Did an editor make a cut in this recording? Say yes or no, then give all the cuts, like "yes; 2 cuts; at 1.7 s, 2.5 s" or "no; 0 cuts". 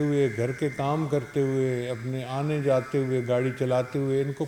no; 0 cuts